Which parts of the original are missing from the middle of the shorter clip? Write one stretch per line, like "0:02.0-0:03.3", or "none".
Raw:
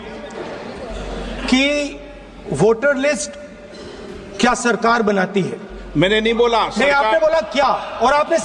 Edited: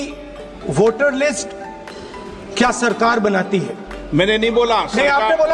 none